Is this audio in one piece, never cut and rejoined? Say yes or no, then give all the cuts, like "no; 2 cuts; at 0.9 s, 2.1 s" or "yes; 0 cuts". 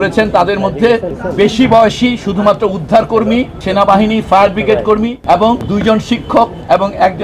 no; 3 cuts; at 1.2 s, 3.6 s, 5.4 s